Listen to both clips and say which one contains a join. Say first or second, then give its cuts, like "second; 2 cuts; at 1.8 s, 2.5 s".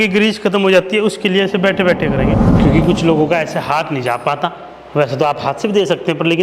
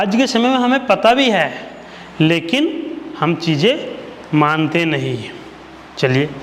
first; 1 cut; at 2.5 s